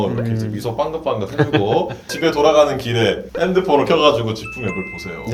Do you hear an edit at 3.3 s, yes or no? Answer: no